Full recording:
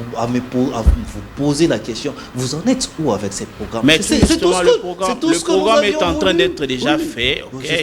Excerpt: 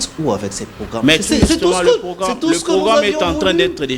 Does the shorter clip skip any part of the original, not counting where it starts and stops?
no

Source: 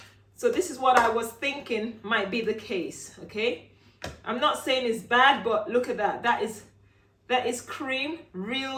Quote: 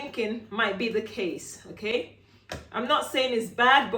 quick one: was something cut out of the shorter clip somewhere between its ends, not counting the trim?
no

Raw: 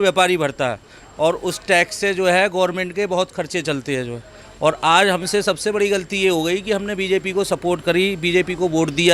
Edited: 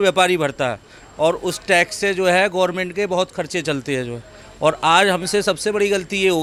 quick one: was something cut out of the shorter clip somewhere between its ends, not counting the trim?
no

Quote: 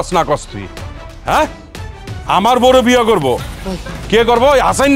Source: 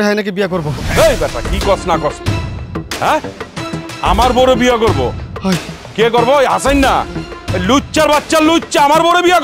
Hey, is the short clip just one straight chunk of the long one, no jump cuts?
no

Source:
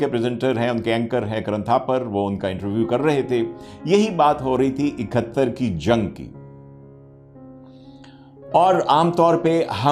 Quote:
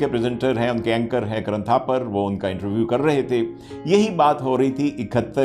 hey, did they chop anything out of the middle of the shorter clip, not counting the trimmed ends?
no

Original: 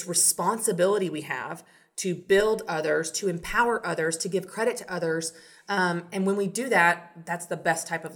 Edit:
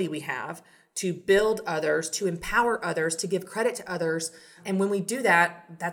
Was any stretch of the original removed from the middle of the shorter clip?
yes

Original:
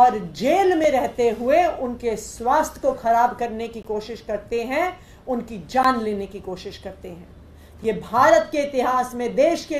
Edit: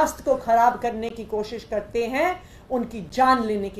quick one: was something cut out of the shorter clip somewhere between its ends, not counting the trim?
no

